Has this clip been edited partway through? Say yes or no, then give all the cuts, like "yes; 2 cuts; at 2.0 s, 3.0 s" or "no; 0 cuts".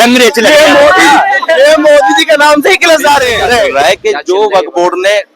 yes; 1 cut; at 3.7 s